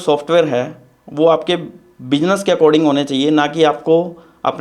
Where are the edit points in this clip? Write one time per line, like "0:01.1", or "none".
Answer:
none